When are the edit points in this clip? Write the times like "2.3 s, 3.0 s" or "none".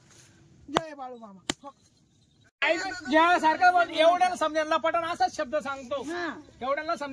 2.4 s